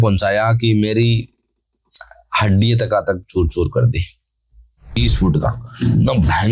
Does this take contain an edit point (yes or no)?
yes